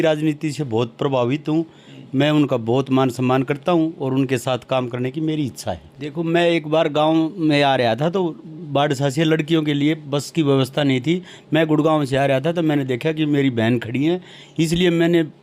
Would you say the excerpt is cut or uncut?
cut